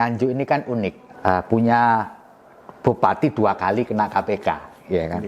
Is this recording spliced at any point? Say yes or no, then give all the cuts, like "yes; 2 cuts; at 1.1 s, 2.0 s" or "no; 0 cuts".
yes; 1 cut; at 1.0 s